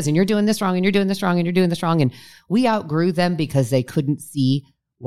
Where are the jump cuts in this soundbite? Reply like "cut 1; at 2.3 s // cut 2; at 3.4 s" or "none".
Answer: none